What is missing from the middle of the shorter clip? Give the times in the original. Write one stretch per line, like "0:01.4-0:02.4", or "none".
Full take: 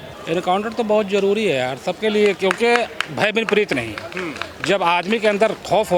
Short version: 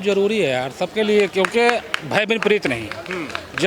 none